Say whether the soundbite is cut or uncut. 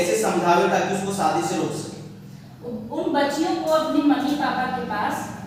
uncut